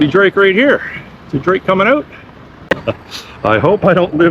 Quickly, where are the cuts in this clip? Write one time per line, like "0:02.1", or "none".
0:02.7

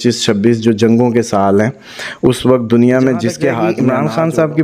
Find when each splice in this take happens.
0:03.7

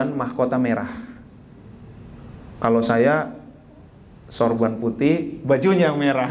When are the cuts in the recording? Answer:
none

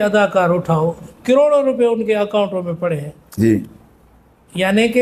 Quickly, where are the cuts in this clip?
none

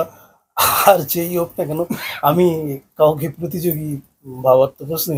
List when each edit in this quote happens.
none

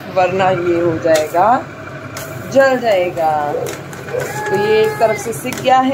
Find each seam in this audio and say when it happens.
none

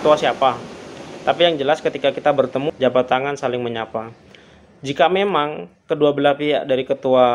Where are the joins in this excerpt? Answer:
0:02.7

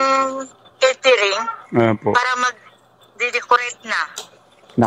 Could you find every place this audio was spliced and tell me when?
none

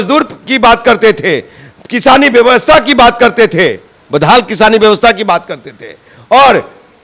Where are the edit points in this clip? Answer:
none

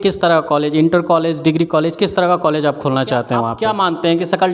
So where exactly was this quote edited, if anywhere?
0:03.5

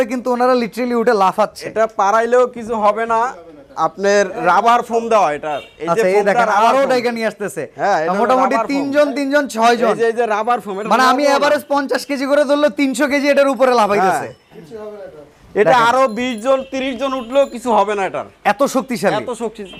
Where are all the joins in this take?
none

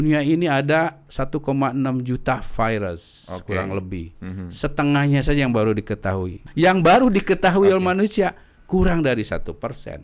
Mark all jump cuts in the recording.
none

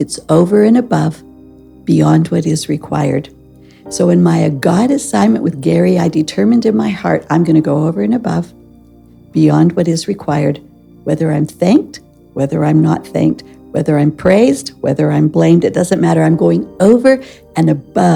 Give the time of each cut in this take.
none

